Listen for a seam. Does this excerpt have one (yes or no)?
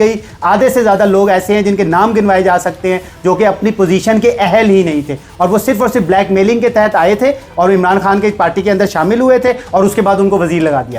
no